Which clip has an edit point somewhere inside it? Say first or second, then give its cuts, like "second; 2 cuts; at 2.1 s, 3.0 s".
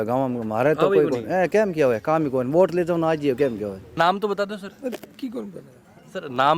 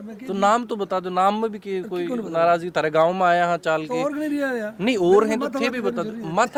first; 1 cut; at 3.8 s